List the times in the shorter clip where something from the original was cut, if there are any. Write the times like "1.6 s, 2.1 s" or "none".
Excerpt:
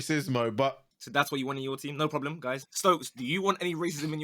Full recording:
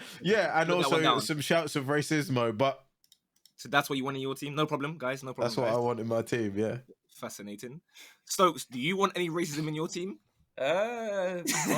0.9 s, 2.7 s